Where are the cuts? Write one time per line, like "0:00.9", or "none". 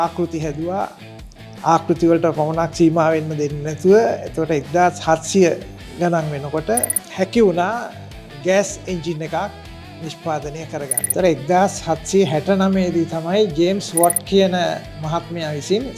none